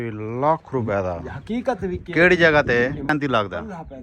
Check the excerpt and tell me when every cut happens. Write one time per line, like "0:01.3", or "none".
0:03.1

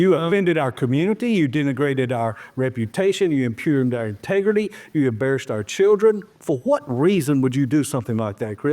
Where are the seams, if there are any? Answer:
0:06.3

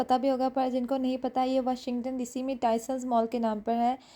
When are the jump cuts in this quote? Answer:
none

